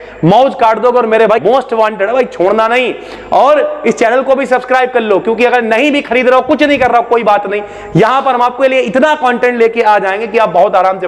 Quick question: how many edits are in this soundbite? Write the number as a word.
one